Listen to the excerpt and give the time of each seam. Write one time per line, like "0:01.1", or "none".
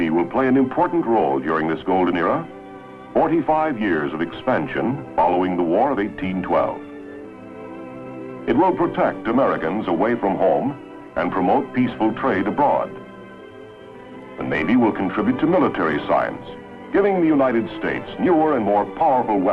none